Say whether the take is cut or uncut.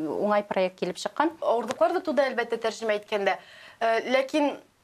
cut